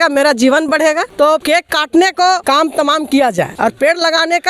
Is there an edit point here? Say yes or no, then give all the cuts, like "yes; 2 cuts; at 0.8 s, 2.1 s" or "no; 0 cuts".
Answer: yes; 3 cuts; at 1.4 s, 2.4 s, 3.5 s